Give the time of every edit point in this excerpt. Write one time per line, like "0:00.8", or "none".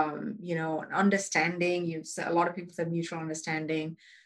none